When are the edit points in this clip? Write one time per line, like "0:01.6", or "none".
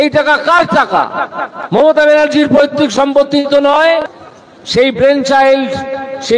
0:04.2